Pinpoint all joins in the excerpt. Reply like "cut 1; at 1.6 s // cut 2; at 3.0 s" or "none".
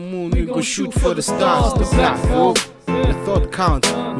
cut 1; at 2.7 s